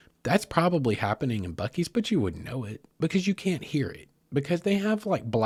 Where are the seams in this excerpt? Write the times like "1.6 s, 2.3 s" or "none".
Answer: none